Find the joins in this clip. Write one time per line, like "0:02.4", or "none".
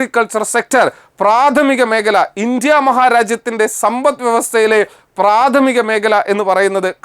none